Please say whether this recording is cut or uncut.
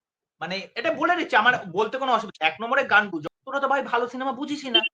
cut